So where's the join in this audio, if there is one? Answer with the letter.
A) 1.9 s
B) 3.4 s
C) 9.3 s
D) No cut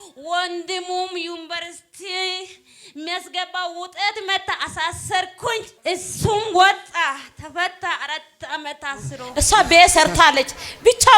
C